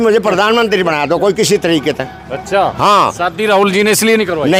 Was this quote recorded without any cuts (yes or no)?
yes